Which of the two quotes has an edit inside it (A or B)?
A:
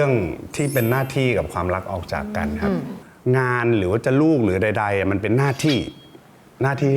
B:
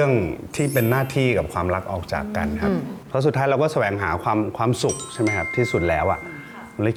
A